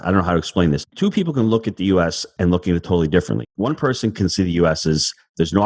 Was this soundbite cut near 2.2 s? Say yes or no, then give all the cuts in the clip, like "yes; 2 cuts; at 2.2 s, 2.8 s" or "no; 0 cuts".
no; 2 cuts; at 0.9 s, 3.4 s